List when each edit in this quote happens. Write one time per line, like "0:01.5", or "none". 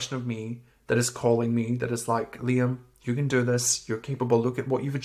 none